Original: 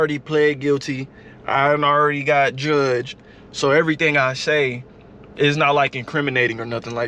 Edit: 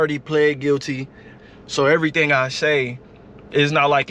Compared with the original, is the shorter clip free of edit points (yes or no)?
no